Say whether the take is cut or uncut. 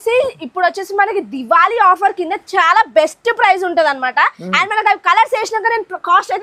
uncut